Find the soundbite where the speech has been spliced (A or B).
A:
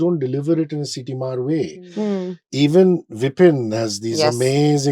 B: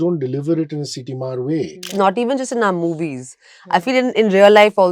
B